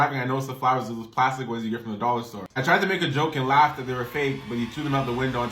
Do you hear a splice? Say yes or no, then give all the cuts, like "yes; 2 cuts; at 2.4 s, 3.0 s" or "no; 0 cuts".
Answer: yes; 1 cut; at 2.4 s